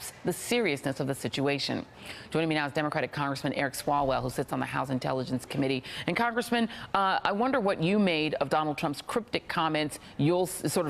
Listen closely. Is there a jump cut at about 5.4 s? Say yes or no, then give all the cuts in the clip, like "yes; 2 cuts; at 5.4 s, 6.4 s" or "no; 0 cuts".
yes; 1 cut; at 5.4 s